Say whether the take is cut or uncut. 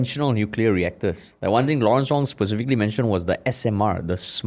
uncut